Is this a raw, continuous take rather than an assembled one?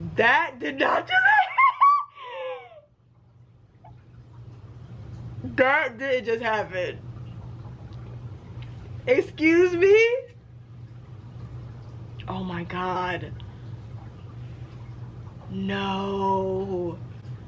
yes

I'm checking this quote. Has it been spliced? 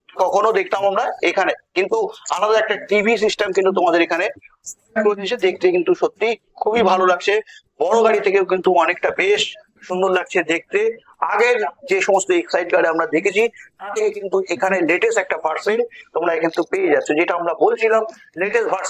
no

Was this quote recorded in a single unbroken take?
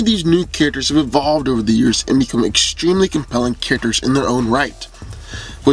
no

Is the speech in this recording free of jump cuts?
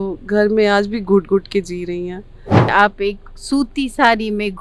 no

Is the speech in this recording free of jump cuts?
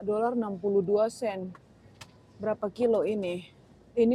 yes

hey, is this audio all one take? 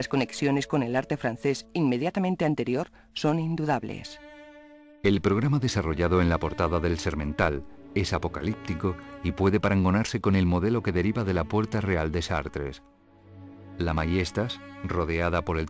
no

